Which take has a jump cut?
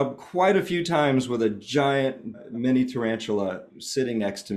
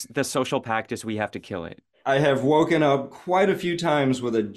second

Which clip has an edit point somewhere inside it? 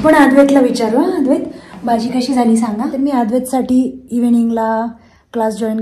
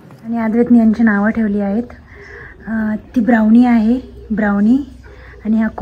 first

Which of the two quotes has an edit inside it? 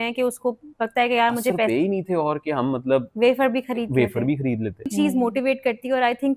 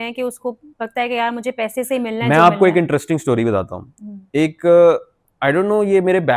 first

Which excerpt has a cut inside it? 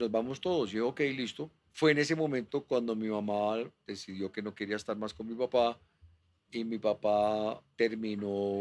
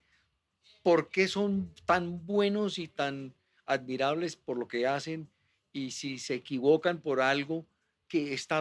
first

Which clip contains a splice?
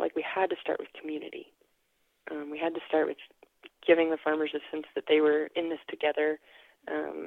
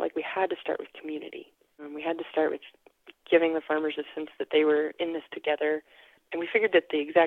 second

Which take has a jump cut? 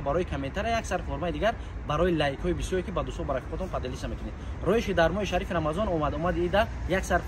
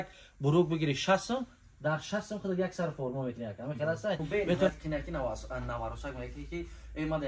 second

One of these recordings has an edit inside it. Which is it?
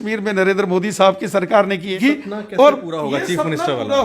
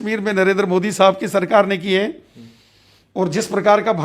first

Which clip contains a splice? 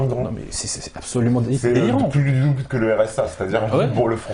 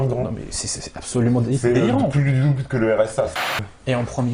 second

